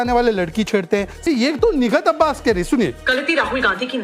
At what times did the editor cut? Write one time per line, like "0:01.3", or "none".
0:01.3